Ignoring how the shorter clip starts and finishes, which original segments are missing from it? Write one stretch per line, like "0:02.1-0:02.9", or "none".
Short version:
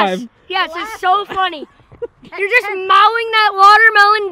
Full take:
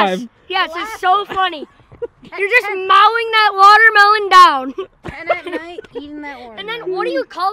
none